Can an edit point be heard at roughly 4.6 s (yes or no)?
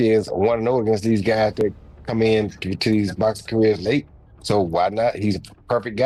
no